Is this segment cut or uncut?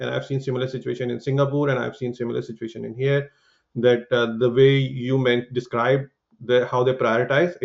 uncut